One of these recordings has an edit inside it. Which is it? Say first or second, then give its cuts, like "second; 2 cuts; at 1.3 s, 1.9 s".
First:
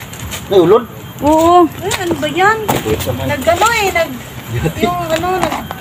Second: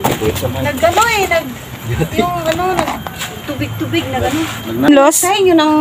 second; 1 cut; at 4.9 s